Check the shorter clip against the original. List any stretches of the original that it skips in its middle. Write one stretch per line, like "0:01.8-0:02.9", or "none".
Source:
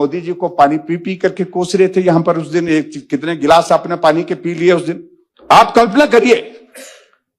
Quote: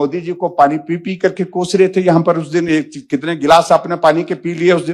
none